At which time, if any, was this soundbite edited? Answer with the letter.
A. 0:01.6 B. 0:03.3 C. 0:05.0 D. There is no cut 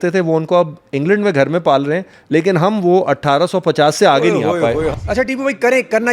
C